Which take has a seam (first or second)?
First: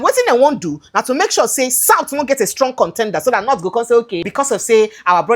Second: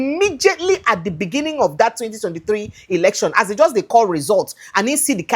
first